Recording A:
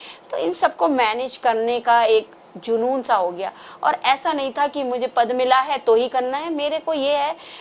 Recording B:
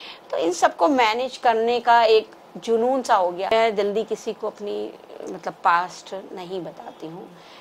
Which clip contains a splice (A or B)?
B